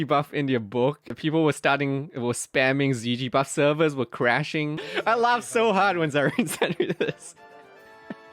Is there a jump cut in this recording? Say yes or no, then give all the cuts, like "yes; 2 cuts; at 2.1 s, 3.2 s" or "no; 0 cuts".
yes; 2 cuts; at 1.1 s, 4.9 s